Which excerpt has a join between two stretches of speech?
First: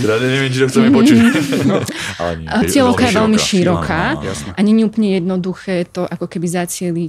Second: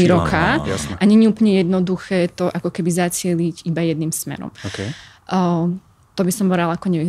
first; 1 cut; at 2.6 s

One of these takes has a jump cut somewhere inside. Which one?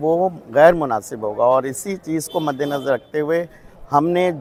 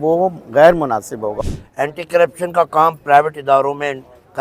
second; 1 cut; at 1.4 s

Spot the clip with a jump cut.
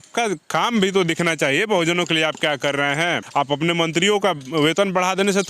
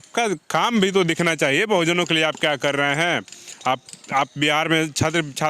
first; 1 cut; at 3.2 s

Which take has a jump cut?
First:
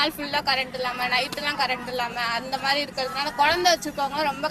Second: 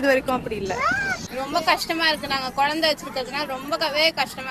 second; 1 cut; at 1.2 s

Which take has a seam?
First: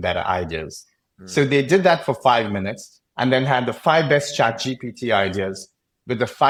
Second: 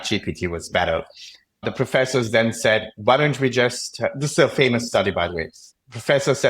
second; 1 cut; at 1.6 s

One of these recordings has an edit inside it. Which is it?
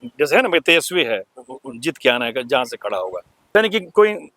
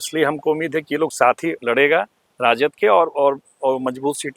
first; 1 cut; at 3.5 s

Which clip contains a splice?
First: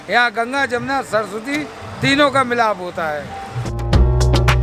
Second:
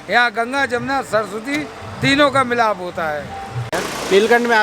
second; 1 cut; at 3.6 s

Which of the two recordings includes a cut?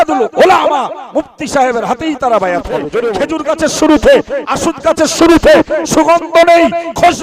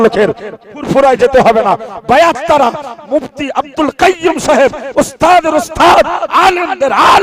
first; 1 cut; at 3.1 s

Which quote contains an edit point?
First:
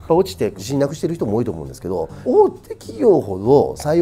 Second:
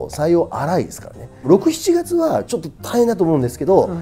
second; 2 cuts; at 1.5 s, 2.5 s

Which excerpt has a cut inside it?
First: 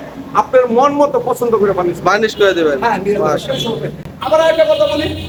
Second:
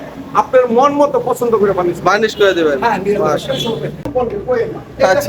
second; 1 cut; at 4.1 s

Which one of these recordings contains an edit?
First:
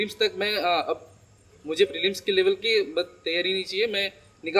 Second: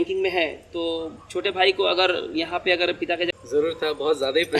second; 1 cut; at 3.3 s

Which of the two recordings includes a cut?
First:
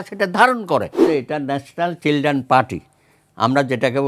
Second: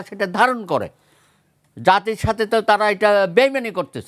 first; 1 cut; at 1.0 s

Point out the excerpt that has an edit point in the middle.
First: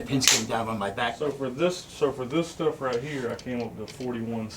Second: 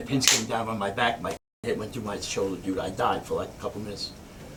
first; 1 cut; at 1.1 s

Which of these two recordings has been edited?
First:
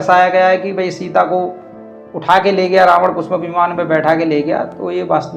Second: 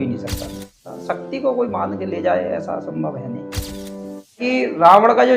second; 2 cuts; at 0.9 s, 4.4 s

